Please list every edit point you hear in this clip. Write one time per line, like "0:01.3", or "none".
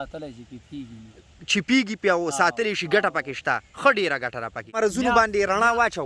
0:04.7